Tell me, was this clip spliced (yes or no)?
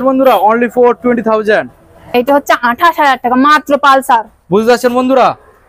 yes